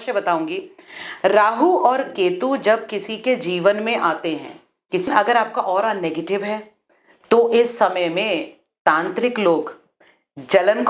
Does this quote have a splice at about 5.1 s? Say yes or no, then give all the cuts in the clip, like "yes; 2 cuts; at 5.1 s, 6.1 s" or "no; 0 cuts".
yes; 1 cut; at 5.1 s